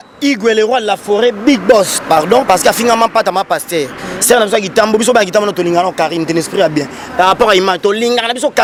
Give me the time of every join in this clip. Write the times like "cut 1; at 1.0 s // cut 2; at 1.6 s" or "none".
none